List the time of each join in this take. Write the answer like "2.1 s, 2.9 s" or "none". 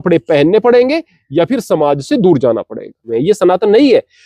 3.1 s